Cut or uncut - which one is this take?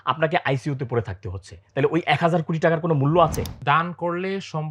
cut